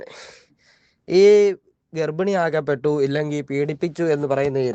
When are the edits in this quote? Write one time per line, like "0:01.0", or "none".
none